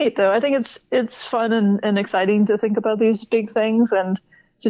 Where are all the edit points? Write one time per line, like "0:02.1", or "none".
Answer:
none